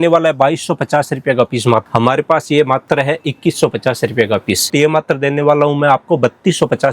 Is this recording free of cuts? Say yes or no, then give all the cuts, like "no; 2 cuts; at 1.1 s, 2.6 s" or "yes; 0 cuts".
no; 2 cuts; at 1.9 s, 4.7 s